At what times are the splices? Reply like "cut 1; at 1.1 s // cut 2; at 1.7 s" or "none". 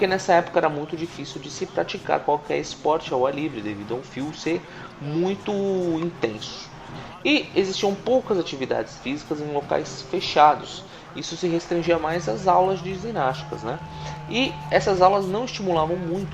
cut 1; at 13.5 s

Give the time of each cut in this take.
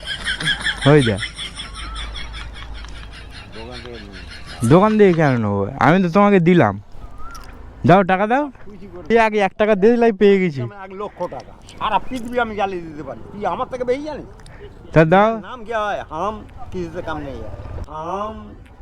cut 1; at 9.1 s

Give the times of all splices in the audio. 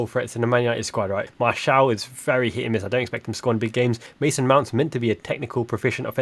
cut 1; at 1.3 s // cut 2; at 4.1 s

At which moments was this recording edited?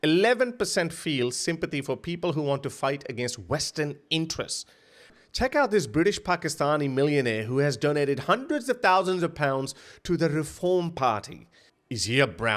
cut 1; at 5.1 s // cut 2; at 11.5 s

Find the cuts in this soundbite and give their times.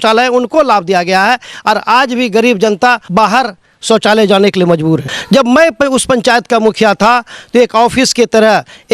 cut 1; at 3.0 s // cut 2; at 5.1 s

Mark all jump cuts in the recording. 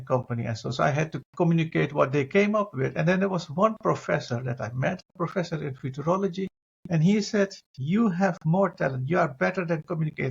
cut 1; at 1.3 s // cut 2; at 5.1 s

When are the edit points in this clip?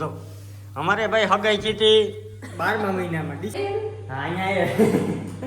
cut 1; at 3.5 s

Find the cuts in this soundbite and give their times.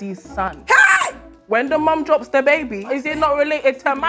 cut 1; at 1.3 s

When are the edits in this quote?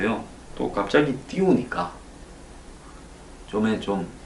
cut 1; at 1.2 s

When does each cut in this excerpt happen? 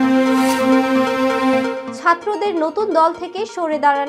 cut 1; at 1.9 s

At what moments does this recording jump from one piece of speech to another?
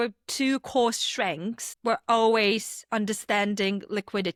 none

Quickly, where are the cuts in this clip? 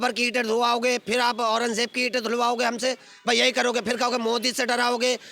none

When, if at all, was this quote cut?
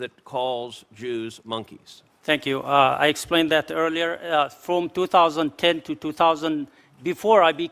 none

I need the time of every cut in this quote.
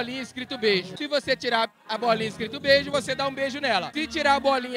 none

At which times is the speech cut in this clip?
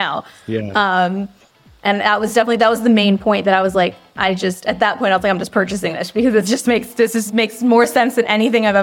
none

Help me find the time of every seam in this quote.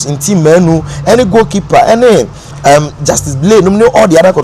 none

